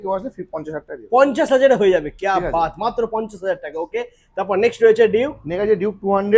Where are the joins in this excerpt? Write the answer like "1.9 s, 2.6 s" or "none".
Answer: none